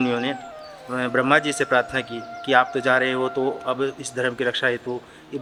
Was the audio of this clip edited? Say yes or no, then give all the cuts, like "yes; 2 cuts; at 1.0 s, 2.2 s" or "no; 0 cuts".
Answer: no; 0 cuts